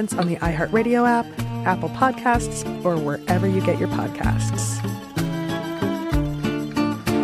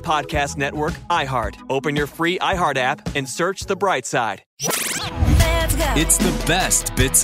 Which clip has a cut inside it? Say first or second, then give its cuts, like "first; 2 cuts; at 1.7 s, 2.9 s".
second; 1 cut; at 4.6 s